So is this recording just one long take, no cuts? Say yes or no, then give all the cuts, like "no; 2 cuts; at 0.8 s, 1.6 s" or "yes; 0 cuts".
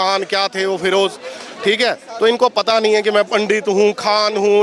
yes; 0 cuts